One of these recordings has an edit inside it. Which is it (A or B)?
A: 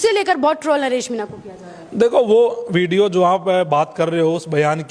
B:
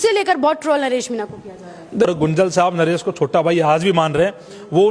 B